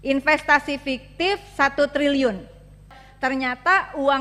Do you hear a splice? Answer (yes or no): yes